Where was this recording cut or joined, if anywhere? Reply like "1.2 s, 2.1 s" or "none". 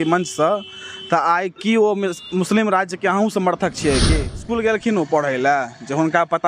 4.4 s